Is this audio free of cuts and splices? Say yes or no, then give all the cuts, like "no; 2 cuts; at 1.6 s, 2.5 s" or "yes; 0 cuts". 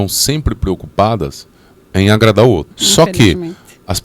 no; 1 cut; at 2.8 s